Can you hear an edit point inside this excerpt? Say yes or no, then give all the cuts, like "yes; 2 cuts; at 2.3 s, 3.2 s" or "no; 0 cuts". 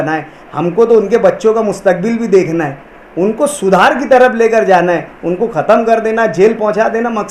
no; 0 cuts